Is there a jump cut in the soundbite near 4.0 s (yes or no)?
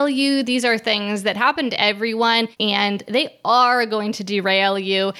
no